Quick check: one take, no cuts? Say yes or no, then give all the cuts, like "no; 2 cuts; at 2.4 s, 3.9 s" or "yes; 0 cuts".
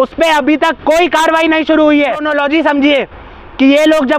no; 1 cut; at 2.3 s